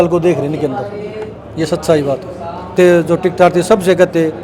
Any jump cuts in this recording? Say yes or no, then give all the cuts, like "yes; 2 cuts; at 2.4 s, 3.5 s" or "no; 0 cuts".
yes; 1 cut; at 2.7 s